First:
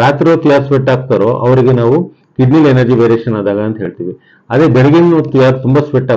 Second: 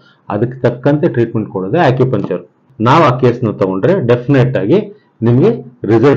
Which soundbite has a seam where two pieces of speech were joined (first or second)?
second